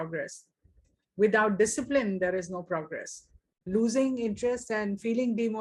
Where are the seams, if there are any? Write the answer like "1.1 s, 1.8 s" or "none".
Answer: 3.7 s